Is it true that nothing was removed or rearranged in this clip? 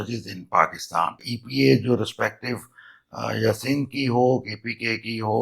no; 1 cut; at 1.4 s

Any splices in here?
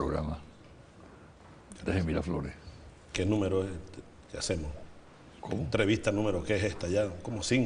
no; 0 cuts

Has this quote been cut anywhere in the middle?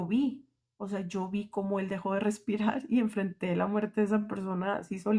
no; 0 cuts

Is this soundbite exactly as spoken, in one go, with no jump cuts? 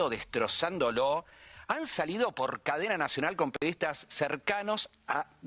yes; 0 cuts

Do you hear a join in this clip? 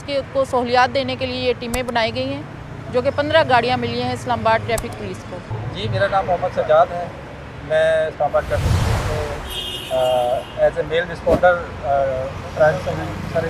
no; 0 cuts

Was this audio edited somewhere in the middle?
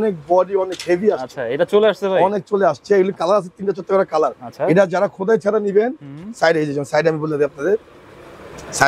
no; 0 cuts

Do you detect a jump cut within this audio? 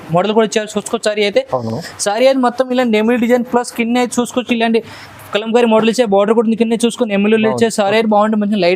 no; 0 cuts

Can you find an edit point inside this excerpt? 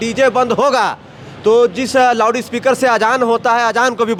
no; 0 cuts

